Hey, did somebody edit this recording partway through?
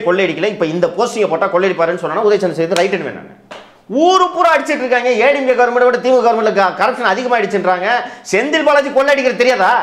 no; 0 cuts

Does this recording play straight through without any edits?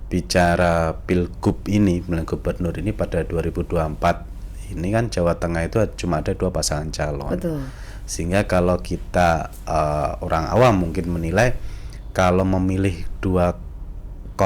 yes; 0 cuts

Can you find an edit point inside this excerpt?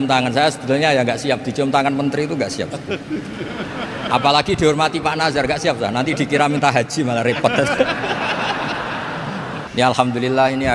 yes; 1 cut; at 9.6 s

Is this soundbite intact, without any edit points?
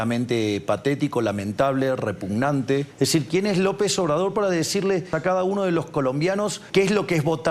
no; 3 cuts; at 2.9 s, 5.1 s, 6.6 s

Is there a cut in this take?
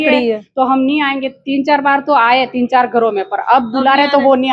no; 0 cuts

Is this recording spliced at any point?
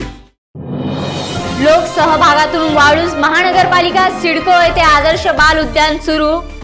yes; 1 cut; at 1.4 s

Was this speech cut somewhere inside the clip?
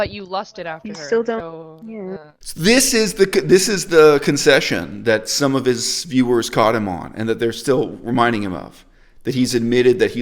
no; 0 cuts

